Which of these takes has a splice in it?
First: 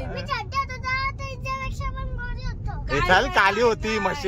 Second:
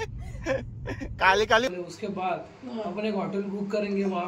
second; 1 cut; at 1.7 s

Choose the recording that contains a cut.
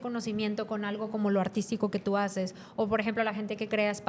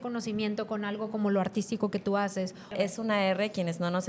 second; 1 cut; at 2.7 s

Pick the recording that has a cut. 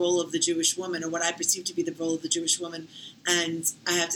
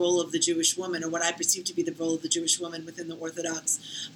first; 1 cut; at 2.9 s

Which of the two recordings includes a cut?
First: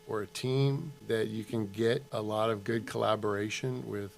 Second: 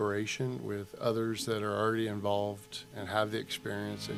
first; 2 cuts; at 0.9 s, 2.1 s

